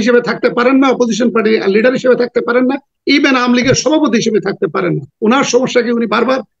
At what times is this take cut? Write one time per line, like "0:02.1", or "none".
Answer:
0:05.1